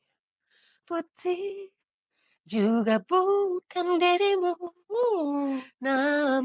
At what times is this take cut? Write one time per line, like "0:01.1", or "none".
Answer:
none